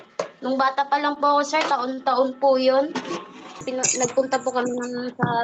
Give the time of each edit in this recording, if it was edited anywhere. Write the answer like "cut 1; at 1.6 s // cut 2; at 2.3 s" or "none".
cut 1; at 3.6 s

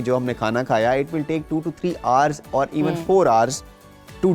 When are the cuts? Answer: none

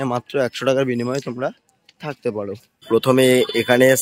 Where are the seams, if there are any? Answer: cut 1; at 2.9 s

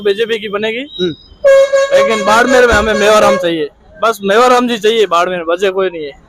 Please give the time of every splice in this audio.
cut 1; at 3.9 s

